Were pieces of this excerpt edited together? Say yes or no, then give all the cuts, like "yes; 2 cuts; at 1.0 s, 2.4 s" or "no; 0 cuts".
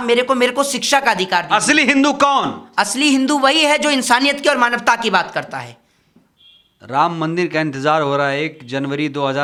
no; 0 cuts